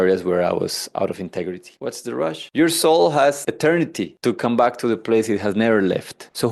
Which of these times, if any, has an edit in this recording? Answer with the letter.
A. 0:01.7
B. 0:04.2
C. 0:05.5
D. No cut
A